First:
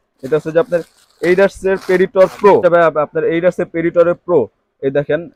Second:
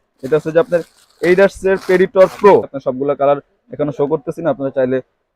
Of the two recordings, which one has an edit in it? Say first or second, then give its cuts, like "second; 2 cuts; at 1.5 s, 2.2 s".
second; 1 cut; at 2.6 s